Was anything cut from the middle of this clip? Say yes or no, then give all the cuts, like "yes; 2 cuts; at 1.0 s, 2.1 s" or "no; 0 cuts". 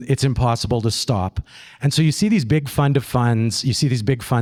no; 0 cuts